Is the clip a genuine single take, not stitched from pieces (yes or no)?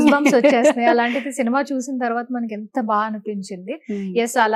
yes